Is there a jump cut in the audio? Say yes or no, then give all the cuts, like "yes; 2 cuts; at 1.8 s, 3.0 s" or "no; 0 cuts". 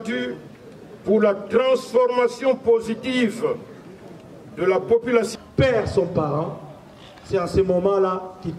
yes; 1 cut; at 5.3 s